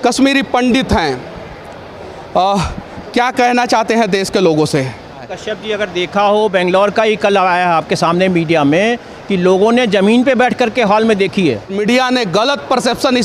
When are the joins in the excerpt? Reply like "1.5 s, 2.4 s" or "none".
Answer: 5.4 s, 11.8 s